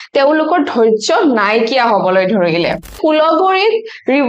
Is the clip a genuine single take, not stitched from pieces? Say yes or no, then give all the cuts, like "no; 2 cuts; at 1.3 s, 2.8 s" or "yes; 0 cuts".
no; 1 cut; at 3.0 s